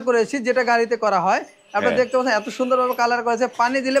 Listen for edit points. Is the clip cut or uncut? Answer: uncut